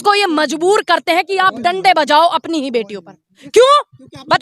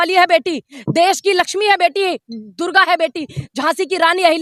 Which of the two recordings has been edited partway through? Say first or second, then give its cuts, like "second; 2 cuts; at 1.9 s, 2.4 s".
first; 1 cut; at 3.4 s